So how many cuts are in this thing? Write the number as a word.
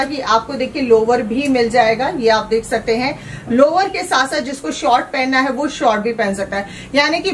zero